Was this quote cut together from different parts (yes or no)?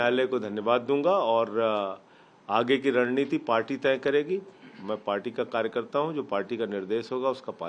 no